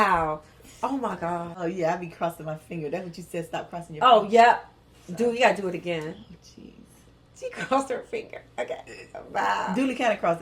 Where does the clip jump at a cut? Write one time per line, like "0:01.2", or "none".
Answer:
0:01.5